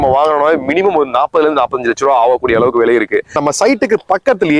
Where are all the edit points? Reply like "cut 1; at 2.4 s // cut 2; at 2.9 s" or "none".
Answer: cut 1; at 3.4 s